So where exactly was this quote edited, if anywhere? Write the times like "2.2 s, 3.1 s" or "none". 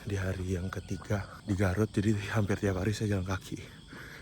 1.3 s